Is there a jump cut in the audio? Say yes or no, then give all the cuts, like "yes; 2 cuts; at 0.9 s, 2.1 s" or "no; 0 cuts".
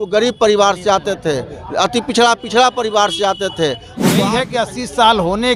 yes; 1 cut; at 4.2 s